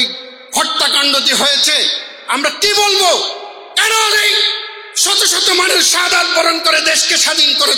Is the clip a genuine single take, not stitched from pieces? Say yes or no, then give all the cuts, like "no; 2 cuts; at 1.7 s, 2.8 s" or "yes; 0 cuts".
yes; 0 cuts